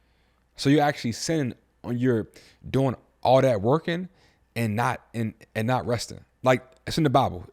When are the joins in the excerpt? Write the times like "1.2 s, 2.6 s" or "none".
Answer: none